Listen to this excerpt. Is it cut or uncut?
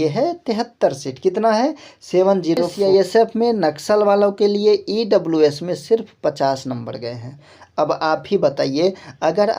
cut